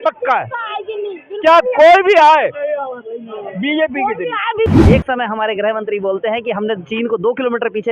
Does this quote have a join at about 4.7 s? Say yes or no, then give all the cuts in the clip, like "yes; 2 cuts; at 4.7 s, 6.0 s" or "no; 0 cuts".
yes; 1 cut; at 4.7 s